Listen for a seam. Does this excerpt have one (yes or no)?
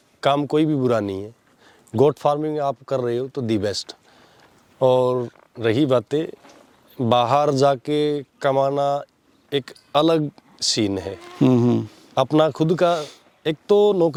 no